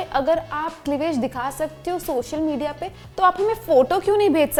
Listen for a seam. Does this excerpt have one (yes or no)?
no